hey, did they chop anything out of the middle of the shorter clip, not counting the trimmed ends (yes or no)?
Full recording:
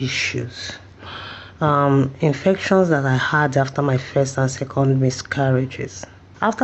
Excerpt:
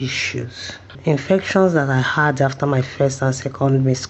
yes